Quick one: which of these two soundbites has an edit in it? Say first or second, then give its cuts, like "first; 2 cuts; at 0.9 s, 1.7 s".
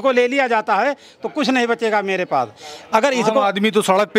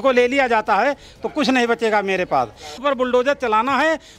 second; 1 cut; at 2.7 s